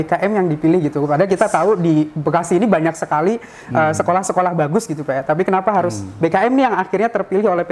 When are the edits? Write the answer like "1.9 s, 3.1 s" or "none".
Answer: none